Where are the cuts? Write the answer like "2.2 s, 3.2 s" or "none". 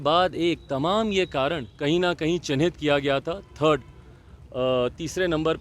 1.7 s